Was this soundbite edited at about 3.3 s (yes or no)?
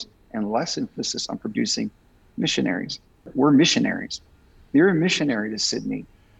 yes